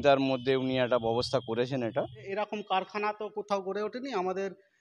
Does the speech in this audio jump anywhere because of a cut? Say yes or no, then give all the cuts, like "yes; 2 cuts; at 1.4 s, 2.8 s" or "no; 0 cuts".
yes; 1 cut; at 2.3 s